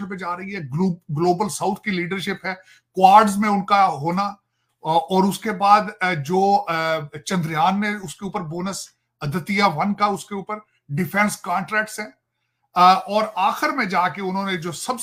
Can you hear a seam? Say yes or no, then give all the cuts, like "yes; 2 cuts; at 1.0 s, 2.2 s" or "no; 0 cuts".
no; 0 cuts